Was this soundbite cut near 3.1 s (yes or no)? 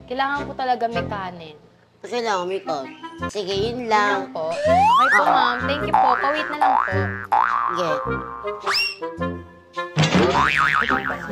yes